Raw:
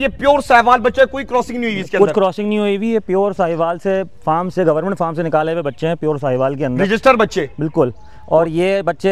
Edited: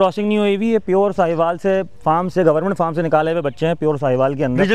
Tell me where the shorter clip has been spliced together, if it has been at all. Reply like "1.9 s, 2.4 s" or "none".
none